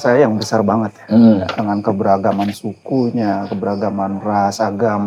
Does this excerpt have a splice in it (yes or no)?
no